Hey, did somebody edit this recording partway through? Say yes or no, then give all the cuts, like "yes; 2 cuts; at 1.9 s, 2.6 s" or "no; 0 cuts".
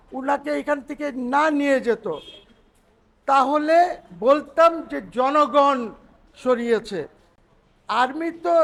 no; 0 cuts